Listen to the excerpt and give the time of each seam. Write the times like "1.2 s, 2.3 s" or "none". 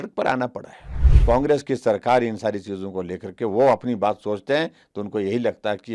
1.1 s